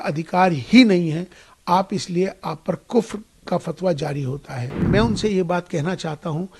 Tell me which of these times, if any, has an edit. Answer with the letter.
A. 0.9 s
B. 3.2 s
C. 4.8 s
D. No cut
C